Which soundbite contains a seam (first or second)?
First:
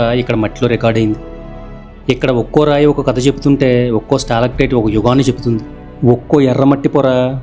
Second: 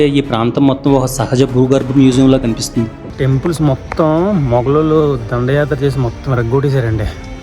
second